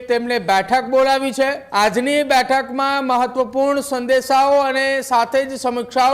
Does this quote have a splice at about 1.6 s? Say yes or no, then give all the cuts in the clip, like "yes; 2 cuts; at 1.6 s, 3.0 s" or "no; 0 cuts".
yes; 1 cut; at 1.6 s